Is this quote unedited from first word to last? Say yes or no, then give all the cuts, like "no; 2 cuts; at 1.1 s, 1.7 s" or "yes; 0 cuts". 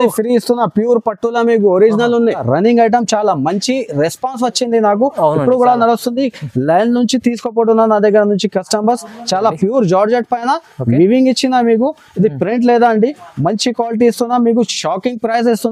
no; 1 cut; at 2.4 s